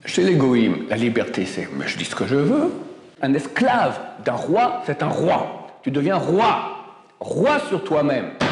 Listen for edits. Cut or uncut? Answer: cut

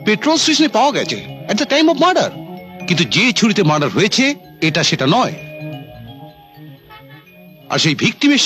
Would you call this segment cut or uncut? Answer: uncut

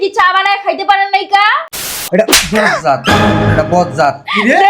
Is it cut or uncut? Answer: cut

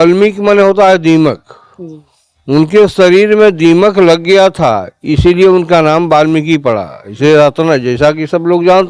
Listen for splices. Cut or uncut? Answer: uncut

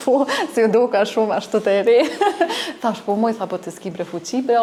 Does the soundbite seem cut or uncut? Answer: uncut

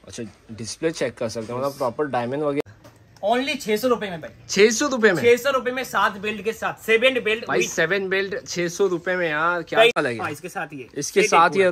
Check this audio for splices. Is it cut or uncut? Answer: cut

